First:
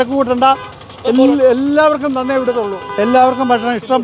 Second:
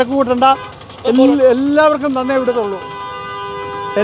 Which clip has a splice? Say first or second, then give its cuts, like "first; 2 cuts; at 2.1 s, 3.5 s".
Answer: first; 1 cut; at 2.8 s